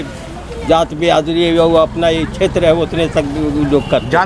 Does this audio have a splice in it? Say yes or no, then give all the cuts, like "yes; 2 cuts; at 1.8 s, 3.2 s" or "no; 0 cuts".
no; 0 cuts